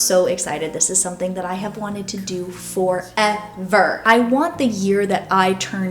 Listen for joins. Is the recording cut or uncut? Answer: cut